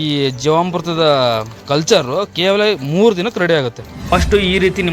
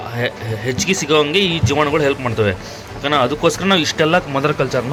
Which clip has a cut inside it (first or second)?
first